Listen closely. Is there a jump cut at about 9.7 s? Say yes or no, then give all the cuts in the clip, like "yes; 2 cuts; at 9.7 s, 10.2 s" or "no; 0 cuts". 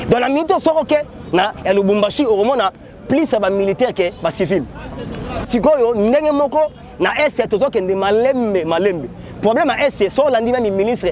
no; 1 cut; at 5.5 s